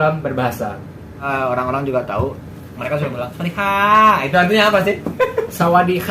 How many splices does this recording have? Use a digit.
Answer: 1